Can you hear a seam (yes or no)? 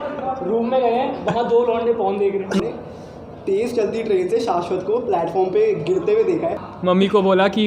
yes